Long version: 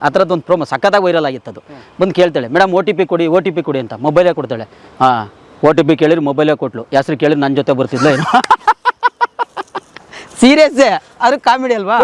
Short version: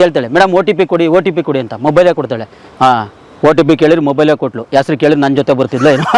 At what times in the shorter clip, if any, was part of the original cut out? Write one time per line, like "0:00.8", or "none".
none